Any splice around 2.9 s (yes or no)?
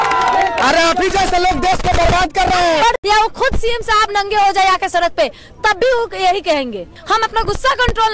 yes